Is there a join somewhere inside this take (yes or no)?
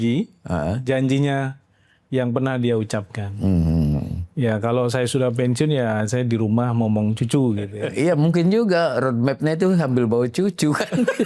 yes